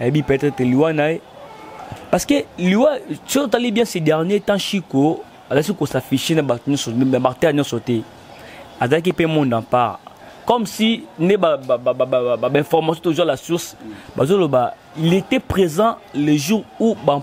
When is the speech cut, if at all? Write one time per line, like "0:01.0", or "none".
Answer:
none